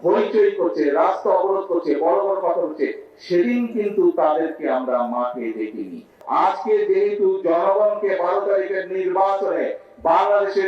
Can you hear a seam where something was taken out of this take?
yes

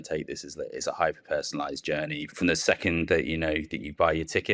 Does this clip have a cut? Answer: yes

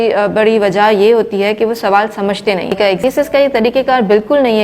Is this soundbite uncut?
no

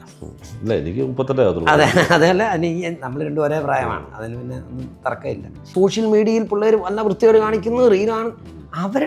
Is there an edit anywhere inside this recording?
yes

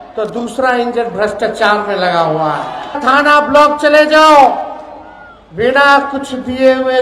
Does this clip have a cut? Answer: yes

